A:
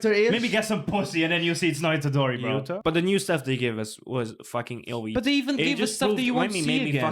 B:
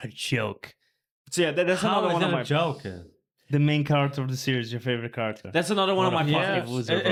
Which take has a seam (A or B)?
A